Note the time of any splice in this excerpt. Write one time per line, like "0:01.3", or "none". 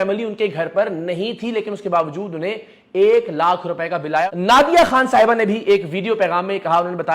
0:04.3